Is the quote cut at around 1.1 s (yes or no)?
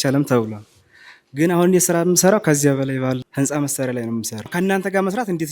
no